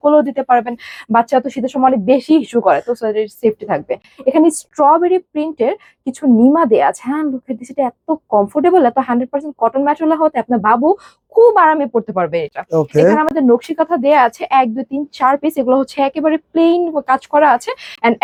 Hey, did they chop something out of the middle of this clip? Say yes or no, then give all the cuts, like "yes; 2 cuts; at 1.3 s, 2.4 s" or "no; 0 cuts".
no; 0 cuts